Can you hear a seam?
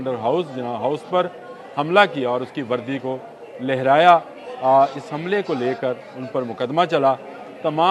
no; 0 cuts

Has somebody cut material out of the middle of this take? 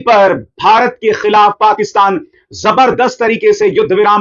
no; 0 cuts

